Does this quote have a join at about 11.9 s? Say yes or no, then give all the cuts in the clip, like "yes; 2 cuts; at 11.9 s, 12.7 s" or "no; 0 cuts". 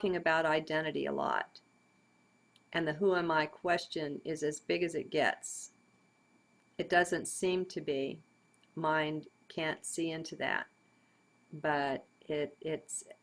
yes; 1 cut; at 11.9 s